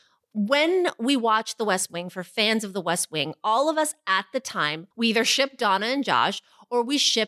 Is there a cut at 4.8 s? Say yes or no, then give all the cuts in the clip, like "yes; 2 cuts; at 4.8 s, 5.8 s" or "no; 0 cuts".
yes; 1 cut; at 4.8 s